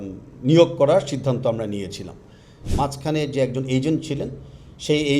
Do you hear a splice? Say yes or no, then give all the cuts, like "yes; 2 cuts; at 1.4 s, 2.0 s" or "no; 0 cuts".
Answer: yes; 1 cut; at 2.5 s